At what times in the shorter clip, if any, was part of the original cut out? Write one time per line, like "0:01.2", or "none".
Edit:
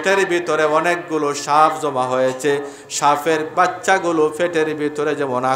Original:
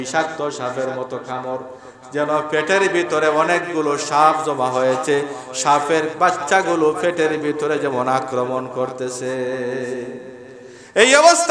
none